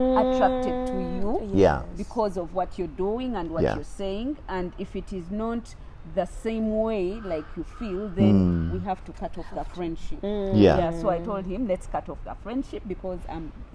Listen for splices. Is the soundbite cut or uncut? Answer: uncut